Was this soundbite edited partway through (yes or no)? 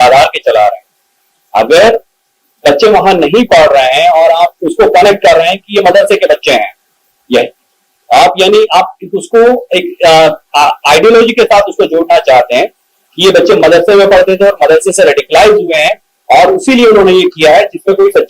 no